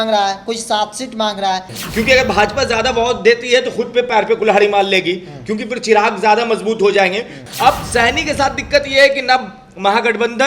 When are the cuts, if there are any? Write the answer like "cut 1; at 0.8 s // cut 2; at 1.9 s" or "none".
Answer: cut 1; at 1.8 s // cut 2; at 7.4 s